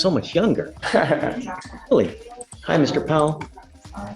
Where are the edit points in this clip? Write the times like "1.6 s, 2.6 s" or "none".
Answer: none